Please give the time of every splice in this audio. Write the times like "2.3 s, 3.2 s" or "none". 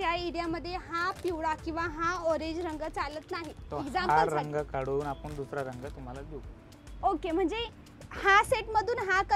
none